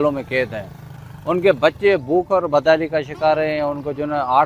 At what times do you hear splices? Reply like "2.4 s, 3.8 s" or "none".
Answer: none